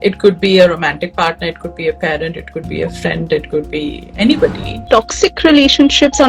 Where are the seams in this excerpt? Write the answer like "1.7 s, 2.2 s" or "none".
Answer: 4.8 s